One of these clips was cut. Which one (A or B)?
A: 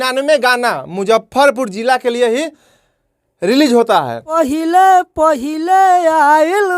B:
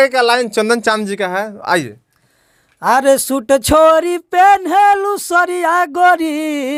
A